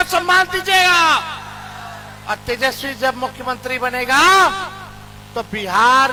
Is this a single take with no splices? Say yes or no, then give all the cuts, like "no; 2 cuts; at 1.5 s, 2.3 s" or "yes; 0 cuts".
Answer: yes; 0 cuts